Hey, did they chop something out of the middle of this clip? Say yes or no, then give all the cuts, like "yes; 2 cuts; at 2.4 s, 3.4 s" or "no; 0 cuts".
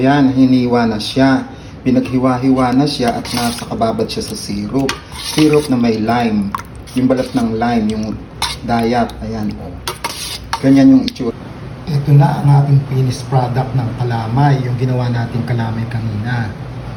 no; 0 cuts